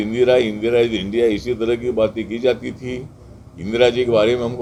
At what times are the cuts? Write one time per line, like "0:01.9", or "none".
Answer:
none